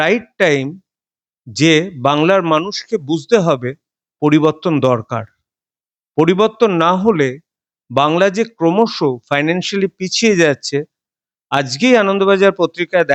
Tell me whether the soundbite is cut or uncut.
uncut